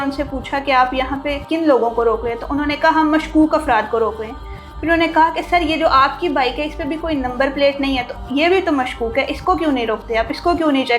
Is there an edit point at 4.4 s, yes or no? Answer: no